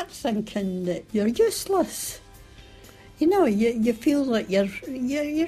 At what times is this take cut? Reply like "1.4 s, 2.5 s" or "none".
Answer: 1.0 s